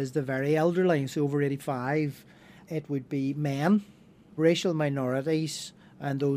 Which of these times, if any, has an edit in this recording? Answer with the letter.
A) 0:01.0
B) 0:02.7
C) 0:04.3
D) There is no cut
C